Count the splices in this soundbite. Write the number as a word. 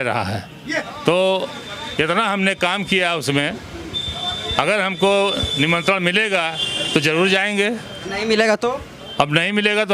one